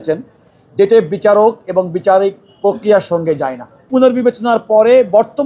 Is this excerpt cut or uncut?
cut